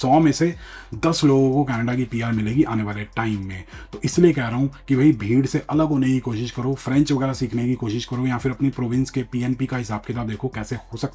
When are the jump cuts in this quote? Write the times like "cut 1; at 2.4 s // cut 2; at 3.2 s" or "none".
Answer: none